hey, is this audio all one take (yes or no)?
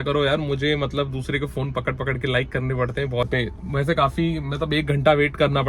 no